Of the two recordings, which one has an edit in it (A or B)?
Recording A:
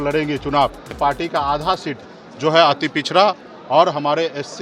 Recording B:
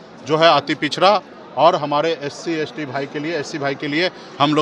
A